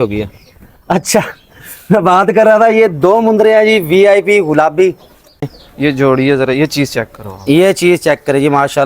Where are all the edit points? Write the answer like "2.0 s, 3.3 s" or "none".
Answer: 5.4 s